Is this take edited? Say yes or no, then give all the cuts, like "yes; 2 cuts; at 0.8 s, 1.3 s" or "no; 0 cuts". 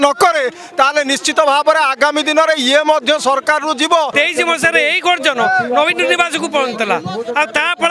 yes; 1 cut; at 4.1 s